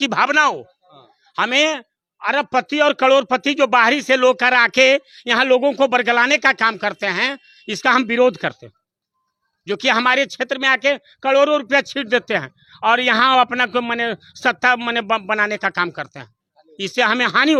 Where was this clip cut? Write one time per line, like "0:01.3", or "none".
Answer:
none